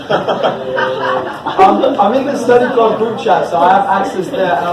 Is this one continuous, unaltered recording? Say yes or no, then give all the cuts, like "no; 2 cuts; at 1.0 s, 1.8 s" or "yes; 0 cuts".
yes; 0 cuts